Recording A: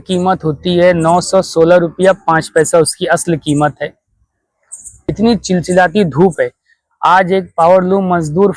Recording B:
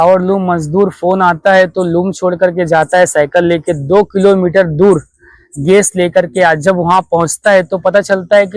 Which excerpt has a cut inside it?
A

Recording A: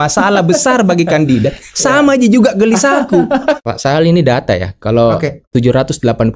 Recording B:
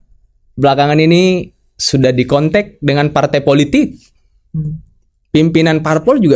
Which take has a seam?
A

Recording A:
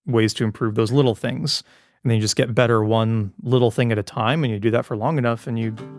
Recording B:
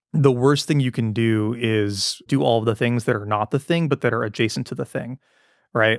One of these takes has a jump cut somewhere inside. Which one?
B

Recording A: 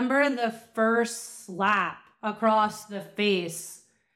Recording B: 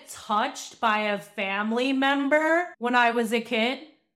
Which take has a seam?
B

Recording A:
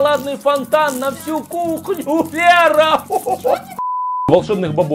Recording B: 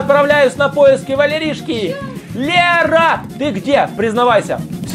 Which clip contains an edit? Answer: A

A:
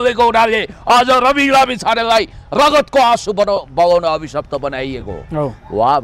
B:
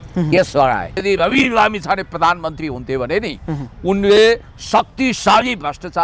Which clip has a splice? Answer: B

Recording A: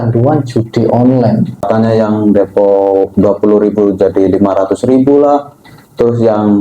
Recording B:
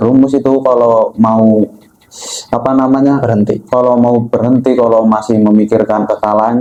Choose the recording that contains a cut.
A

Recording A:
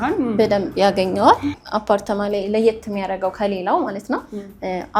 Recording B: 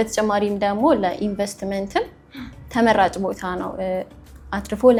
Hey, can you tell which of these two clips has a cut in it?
A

